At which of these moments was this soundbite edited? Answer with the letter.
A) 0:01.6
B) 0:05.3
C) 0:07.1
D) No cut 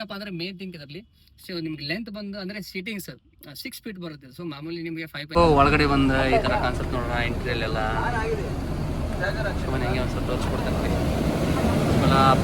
B